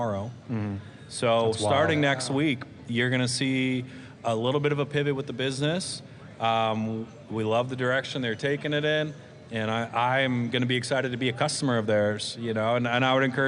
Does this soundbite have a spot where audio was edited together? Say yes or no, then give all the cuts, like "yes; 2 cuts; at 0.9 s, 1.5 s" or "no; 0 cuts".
no; 0 cuts